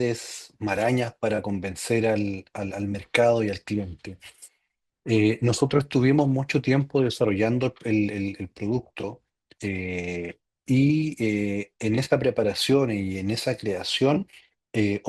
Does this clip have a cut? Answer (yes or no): no